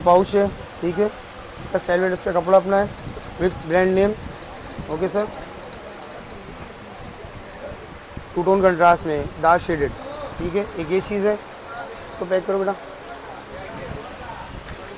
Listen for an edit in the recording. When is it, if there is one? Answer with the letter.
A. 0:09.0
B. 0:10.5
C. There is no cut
C